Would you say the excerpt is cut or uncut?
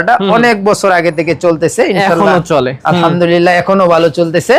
uncut